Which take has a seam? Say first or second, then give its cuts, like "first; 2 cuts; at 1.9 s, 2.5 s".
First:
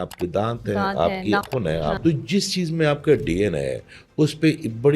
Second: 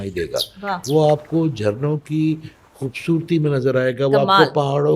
first; 1 cut; at 1.4 s